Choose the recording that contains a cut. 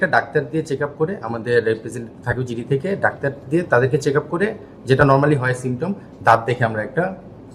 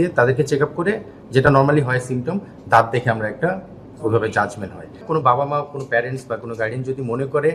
second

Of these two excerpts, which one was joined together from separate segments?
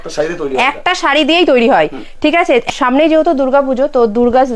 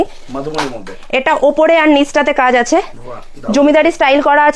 first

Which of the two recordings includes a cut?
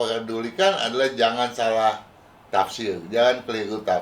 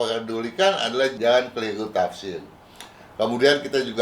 second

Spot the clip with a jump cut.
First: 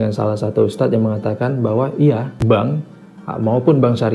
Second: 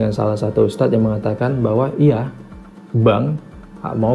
first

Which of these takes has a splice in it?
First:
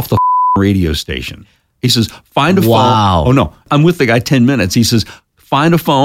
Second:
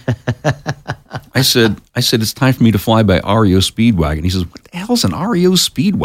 first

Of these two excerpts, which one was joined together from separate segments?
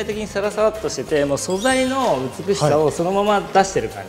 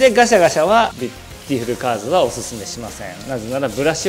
second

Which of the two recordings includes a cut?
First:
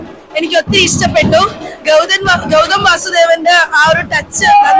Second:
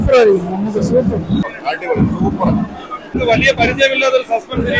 second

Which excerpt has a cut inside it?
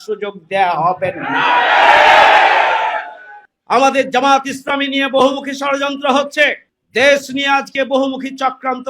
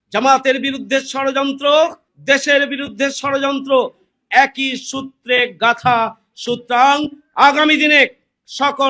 first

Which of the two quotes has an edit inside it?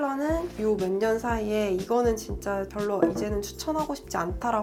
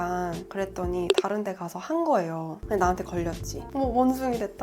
second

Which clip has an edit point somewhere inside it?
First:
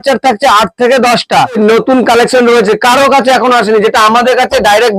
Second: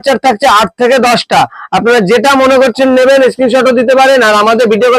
first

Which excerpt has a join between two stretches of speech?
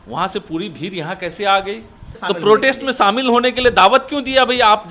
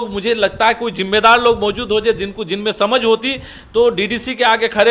first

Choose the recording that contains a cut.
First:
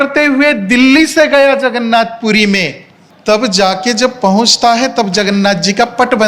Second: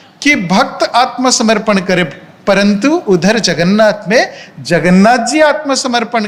first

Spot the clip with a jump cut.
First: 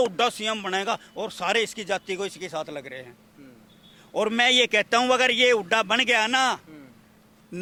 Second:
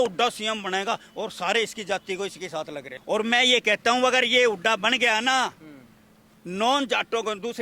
second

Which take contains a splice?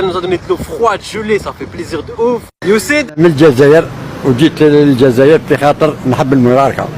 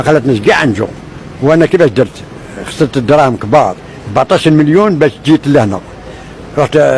first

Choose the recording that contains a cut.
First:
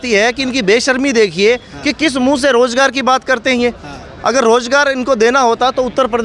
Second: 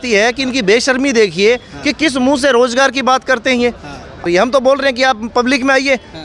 second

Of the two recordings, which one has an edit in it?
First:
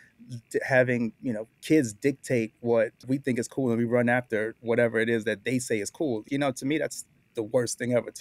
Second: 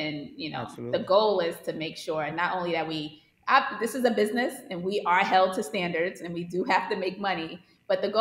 first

